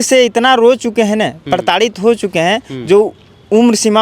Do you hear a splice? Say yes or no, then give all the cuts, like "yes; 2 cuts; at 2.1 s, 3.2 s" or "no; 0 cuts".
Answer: no; 0 cuts